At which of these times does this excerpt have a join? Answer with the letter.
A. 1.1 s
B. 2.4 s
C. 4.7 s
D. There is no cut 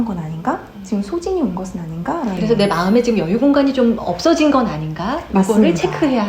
B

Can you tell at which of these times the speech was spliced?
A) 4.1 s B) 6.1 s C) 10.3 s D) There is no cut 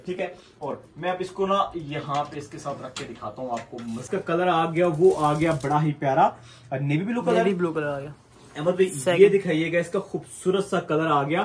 A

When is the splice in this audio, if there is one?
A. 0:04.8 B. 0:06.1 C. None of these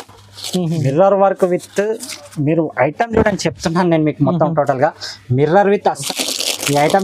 B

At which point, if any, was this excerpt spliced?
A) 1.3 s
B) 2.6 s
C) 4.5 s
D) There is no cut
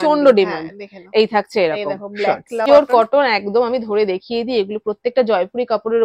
B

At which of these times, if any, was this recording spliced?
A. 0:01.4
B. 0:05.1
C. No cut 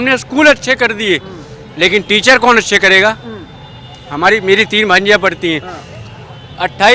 C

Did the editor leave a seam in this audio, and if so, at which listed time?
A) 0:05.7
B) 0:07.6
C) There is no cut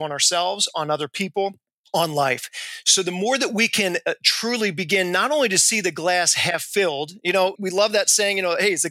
B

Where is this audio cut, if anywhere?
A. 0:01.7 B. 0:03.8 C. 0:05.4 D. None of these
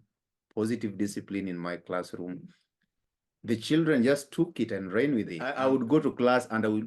C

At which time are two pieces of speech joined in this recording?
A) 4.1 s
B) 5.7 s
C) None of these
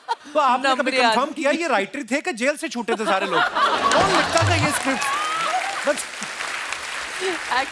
C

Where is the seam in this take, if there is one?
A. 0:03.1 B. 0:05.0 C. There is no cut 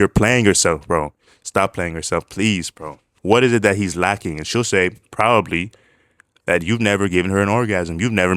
A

